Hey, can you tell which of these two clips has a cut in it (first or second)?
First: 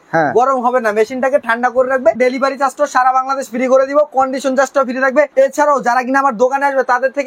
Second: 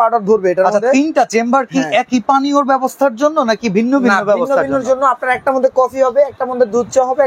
first